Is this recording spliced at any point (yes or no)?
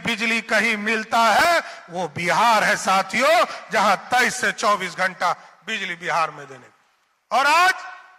no